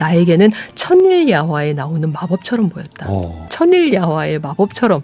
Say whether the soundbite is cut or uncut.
cut